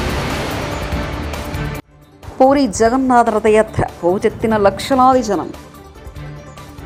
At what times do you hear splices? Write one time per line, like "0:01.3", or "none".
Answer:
none